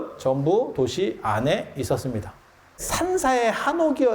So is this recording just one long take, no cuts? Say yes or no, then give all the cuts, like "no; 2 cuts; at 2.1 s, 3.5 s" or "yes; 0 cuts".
no; 1 cut; at 2.9 s